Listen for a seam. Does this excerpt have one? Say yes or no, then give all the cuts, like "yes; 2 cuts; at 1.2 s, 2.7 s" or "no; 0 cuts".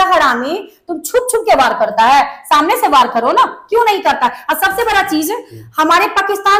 no; 0 cuts